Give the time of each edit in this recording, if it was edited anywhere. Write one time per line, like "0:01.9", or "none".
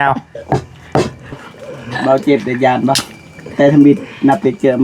0:01.3